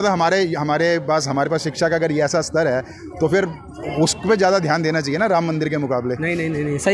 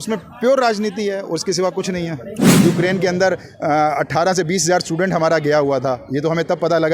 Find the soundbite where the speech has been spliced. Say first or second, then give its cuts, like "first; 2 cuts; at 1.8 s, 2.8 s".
second; 1 cut; at 2.5 s